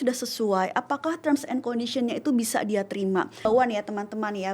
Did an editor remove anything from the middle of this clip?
yes; 1 cut; at 3.5 s

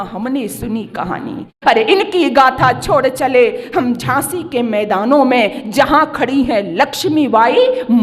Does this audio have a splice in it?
yes; 1 cut; at 1.6 s

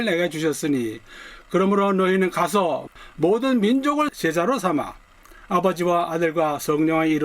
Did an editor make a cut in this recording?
yes; 2 cuts; at 2.9 s, 4.1 s

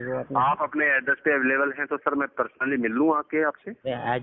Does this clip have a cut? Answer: no; 0 cuts

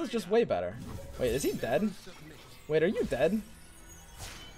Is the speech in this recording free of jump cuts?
yes; 0 cuts

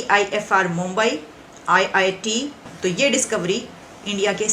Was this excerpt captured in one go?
no; 1 cut; at 2.6 s

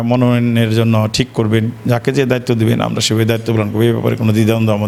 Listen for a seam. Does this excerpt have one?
no; 0 cuts

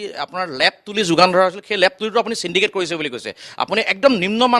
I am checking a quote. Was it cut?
no; 0 cuts

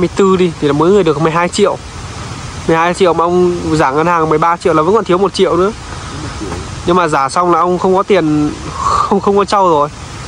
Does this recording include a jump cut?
no; 0 cuts

